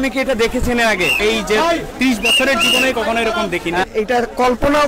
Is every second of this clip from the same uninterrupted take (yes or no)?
no